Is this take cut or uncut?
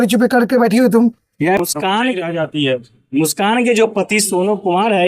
cut